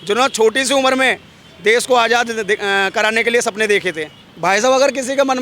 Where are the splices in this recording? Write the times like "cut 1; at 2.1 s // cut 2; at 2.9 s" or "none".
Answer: cut 1; at 4.2 s